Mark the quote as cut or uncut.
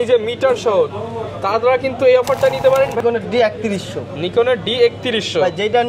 cut